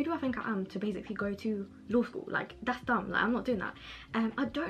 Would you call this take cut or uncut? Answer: uncut